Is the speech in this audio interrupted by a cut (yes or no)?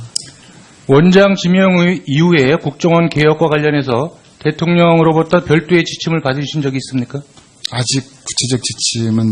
no